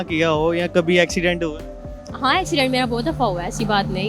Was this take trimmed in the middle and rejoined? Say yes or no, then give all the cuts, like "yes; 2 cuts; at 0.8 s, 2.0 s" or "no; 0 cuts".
no; 0 cuts